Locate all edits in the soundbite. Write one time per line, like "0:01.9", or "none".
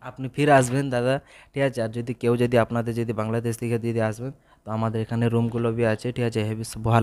none